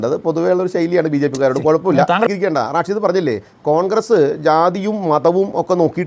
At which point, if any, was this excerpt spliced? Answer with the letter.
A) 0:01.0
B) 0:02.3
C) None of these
B